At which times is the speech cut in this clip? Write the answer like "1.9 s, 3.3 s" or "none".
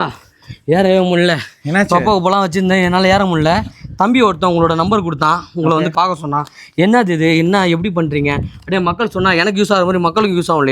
5.9 s